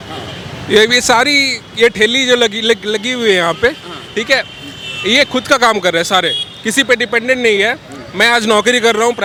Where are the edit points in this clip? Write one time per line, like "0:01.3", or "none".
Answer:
none